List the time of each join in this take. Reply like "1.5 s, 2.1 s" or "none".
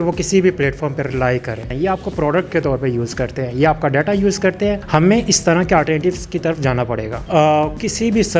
1.7 s, 4.8 s, 7.1 s